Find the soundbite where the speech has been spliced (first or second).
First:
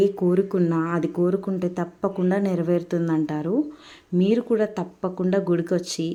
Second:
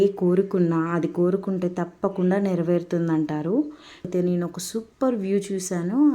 second